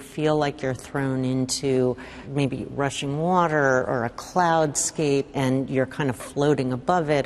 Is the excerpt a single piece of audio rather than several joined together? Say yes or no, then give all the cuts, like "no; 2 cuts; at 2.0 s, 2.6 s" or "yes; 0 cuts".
yes; 0 cuts